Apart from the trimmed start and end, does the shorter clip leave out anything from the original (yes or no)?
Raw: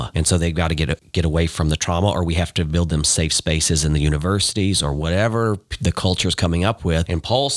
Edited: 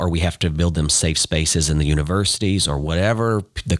no